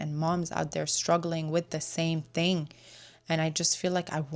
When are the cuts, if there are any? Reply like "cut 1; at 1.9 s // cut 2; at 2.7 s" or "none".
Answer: none